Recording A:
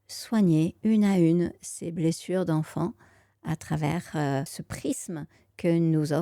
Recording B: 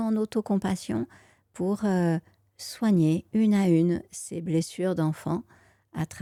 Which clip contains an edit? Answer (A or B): A